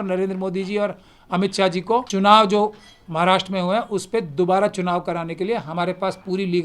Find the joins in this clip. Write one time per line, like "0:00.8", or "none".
0:02.1